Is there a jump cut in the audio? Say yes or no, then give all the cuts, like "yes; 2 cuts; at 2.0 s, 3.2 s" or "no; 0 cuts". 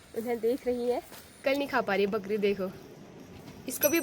yes; 1 cut; at 1.3 s